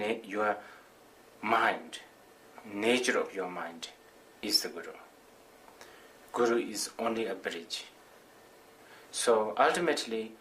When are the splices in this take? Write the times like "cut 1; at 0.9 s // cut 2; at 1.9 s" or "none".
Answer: cut 1; at 6.5 s